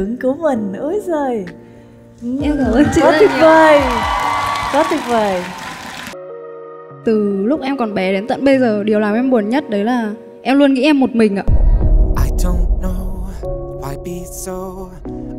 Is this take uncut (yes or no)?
no